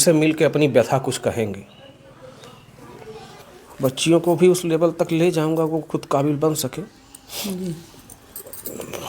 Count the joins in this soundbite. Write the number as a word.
one